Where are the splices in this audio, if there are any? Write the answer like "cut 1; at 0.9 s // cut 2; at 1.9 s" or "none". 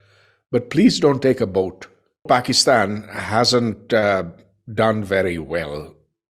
cut 1; at 2.2 s